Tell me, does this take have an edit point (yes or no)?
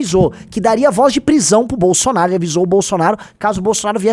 no